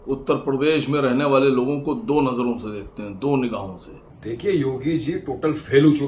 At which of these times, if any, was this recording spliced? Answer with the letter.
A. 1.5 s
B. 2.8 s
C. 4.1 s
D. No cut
C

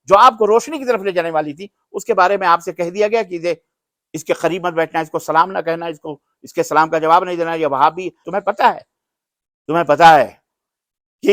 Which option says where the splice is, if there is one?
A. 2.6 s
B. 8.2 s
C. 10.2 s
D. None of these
B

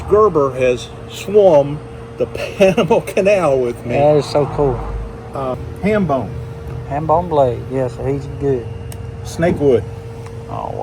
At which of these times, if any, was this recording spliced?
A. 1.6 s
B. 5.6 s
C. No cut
B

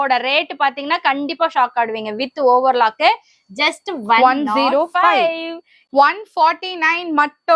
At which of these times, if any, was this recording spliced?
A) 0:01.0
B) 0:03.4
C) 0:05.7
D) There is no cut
C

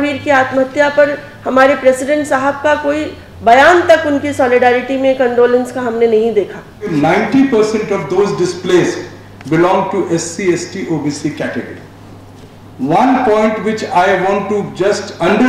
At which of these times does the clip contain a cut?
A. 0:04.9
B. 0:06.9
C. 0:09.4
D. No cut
B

